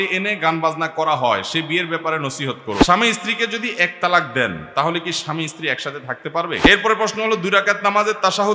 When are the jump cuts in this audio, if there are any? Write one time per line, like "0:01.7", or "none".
0:02.9
0:06.6